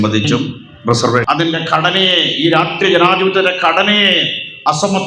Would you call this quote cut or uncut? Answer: cut